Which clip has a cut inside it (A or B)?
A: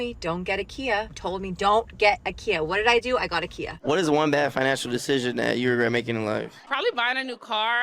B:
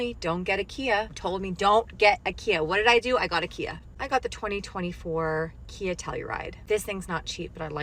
A